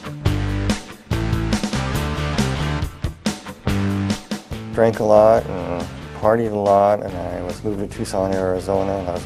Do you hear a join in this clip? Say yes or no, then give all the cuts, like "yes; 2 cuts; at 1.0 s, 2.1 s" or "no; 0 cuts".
yes; 1 cut; at 3.5 s